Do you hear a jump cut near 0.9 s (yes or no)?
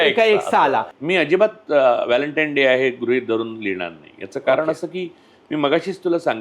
yes